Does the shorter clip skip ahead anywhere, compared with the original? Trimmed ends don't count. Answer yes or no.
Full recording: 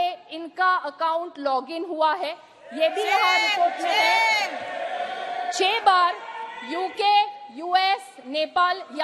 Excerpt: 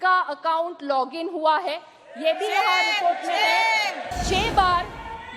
yes